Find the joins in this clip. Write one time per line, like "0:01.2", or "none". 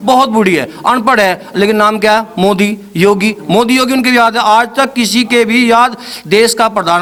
none

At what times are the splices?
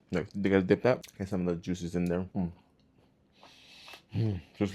none

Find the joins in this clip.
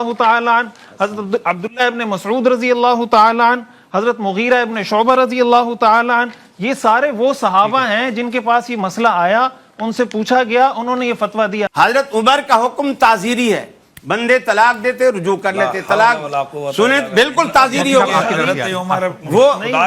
0:11.7

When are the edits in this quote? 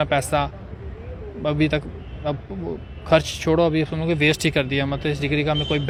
none

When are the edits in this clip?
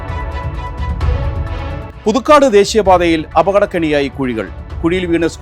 0:01.9

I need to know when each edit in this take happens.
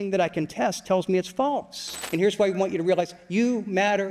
0:02.0

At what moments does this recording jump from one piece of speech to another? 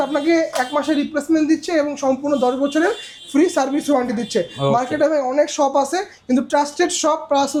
none

